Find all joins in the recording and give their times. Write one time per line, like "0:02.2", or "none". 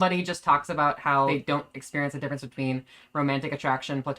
0:01.3

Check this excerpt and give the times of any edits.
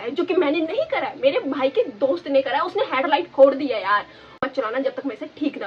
0:04.4

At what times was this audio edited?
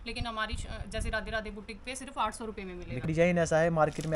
0:03.0

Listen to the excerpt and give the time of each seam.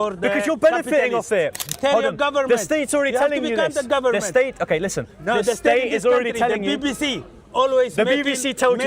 0:01.7

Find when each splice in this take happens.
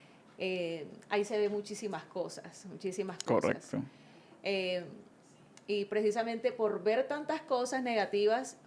none

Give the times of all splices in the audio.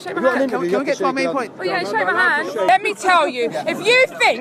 0:02.7

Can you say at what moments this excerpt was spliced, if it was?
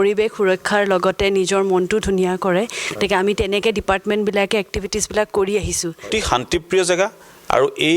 0:06.1

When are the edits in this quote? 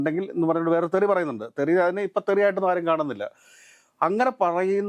none

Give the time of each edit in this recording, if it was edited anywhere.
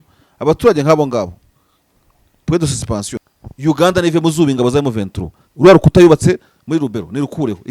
0:03.1

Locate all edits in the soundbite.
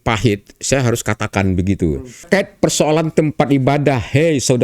0:02.3

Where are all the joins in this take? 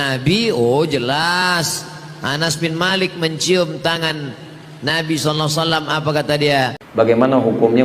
0:06.8

